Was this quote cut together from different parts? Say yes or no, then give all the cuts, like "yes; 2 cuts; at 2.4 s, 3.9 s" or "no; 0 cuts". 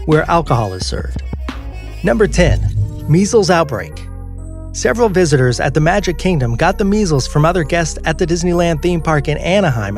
no; 0 cuts